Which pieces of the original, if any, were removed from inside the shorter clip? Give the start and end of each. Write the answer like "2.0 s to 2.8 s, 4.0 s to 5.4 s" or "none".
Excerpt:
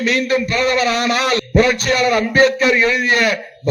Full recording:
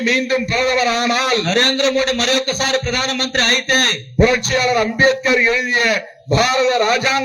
1.4 s to 4.1 s